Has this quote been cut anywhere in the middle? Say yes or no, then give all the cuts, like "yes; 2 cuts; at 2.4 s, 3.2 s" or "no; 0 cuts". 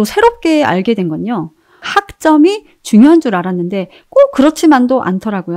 yes; 1 cut; at 1.8 s